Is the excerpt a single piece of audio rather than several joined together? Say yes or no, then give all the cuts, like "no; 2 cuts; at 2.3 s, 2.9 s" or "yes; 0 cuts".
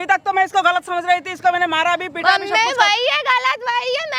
yes; 0 cuts